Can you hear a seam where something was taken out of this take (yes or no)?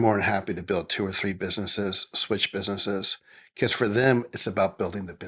no